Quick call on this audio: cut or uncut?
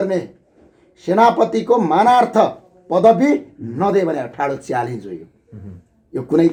uncut